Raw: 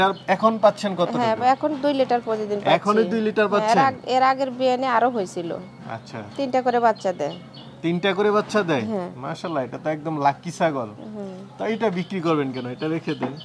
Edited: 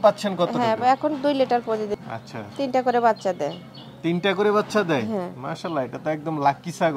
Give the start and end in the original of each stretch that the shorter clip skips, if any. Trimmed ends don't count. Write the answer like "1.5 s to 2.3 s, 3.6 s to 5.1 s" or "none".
2.5 s to 5.7 s